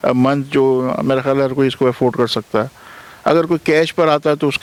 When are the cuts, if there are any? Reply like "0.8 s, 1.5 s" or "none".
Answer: none